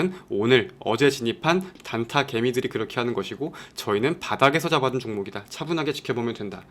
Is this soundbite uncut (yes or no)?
no